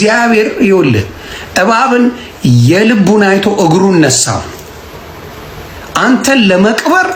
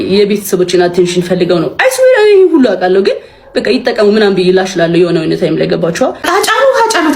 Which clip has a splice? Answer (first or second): second